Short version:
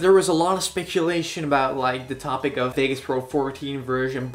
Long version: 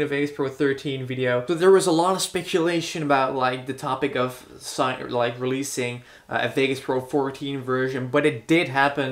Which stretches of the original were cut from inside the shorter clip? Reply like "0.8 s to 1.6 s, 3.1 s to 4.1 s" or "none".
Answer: 4.3 s to 6.5 s